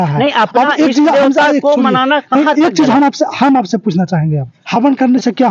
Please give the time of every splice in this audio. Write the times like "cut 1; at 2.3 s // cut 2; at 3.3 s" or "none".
cut 1; at 4.5 s